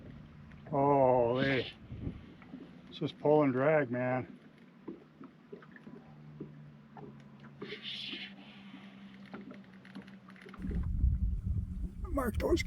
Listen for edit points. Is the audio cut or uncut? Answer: cut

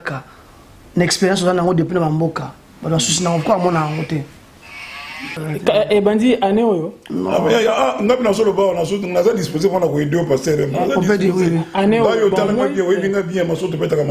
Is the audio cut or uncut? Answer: cut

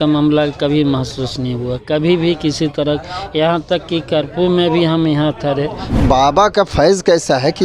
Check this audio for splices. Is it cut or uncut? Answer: cut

